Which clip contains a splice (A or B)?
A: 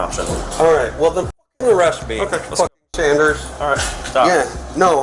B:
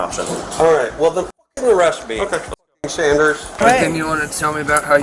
B